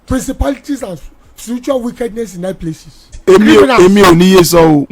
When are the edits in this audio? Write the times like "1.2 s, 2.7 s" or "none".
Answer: 3.2 s